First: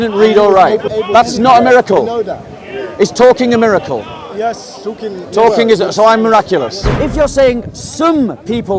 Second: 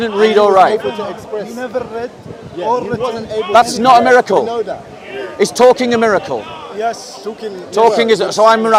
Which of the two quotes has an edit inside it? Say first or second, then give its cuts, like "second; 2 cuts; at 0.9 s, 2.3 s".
first; 2 cuts; at 0.9 s, 6.9 s